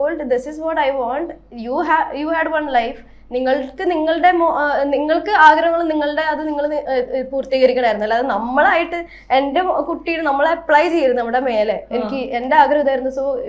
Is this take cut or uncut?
uncut